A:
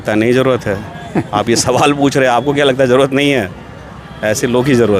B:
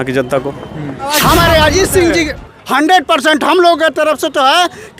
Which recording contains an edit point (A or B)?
B